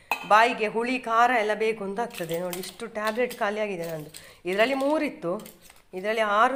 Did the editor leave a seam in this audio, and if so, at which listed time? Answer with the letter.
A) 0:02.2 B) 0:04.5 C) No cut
C